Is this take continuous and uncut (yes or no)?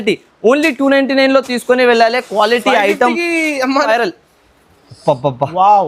no